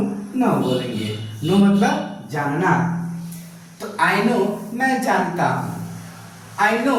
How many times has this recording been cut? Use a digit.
0